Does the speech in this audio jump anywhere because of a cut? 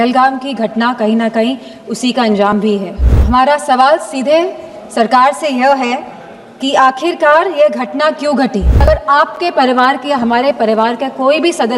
yes; 2 cuts; at 3.1 s, 8.8 s

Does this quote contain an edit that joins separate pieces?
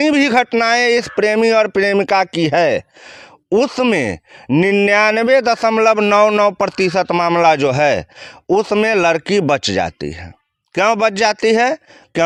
no; 0 cuts

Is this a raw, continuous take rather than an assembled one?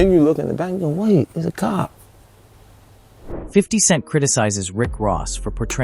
yes; 0 cuts

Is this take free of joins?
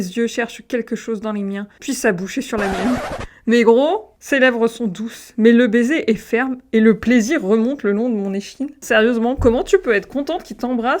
no; 1 cut; at 8.7 s

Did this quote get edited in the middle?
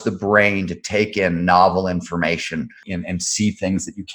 yes; 1 cut; at 2.8 s

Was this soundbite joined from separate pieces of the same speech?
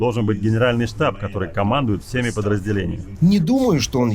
yes; 1 cut; at 3.0 s

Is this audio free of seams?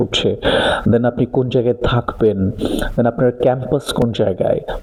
yes; 0 cuts

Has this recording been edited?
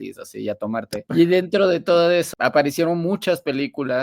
yes; 2 cuts; at 1.0 s, 2.3 s

